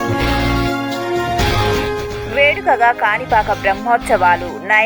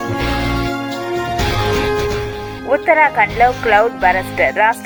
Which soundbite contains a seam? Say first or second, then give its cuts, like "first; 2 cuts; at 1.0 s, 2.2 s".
first; 1 cut; at 1.8 s